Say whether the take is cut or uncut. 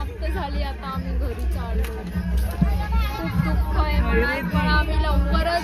uncut